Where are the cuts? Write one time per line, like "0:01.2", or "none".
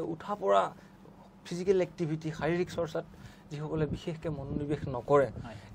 none